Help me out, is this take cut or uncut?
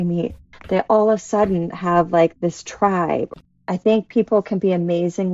cut